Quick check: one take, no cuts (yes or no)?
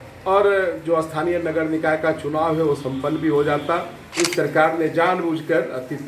no